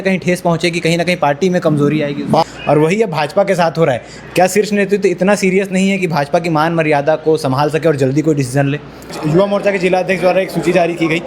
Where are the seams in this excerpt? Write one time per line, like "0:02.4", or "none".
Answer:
0:02.4
0:09.2